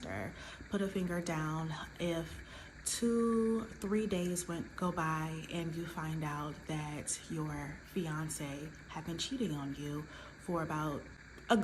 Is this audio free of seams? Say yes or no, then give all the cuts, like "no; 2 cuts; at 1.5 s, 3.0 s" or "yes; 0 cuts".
yes; 0 cuts